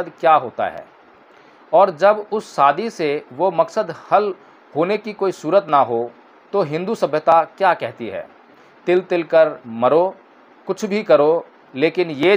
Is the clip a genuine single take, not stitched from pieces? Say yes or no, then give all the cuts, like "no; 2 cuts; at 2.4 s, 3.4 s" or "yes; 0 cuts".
yes; 0 cuts